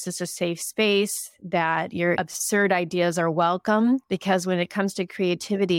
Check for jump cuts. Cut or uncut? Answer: cut